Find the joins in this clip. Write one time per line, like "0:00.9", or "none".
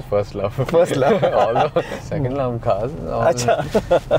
none